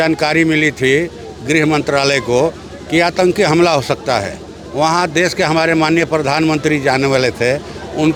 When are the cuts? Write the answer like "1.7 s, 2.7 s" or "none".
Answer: none